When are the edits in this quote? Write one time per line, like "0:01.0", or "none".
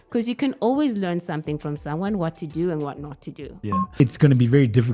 0:04.0